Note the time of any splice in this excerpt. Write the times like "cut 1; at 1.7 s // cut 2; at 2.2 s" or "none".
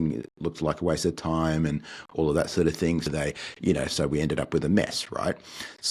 cut 1; at 3.1 s